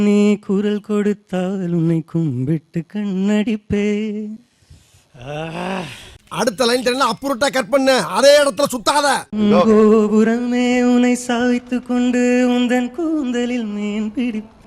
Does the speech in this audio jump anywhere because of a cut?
no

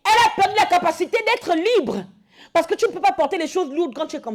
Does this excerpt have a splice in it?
no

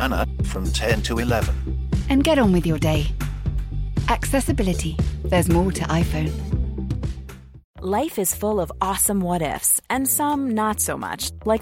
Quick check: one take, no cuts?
yes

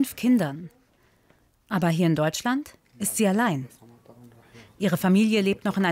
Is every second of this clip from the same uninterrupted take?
yes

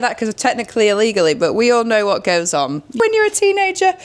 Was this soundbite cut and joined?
no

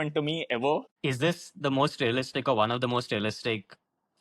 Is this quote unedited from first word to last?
no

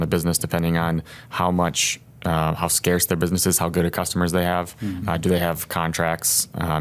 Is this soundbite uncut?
yes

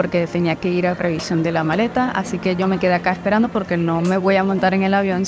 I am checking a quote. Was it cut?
no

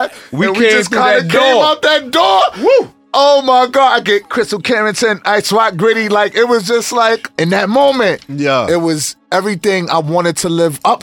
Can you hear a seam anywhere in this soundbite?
yes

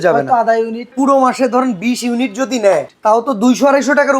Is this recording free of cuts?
no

